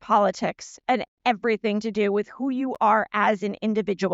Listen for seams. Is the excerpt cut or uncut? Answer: uncut